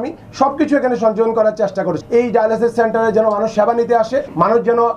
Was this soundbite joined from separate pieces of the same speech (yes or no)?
yes